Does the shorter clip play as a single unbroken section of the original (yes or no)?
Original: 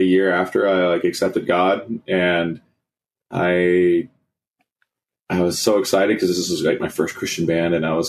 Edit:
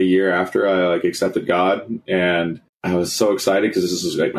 no